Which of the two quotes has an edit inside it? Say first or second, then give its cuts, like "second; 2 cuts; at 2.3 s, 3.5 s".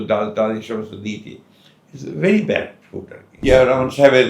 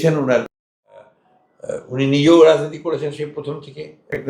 first; 1 cut; at 3.3 s